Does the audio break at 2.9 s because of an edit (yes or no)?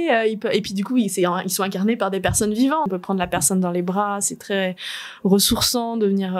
yes